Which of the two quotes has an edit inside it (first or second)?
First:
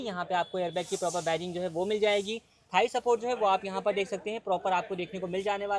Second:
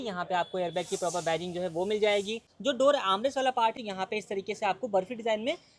second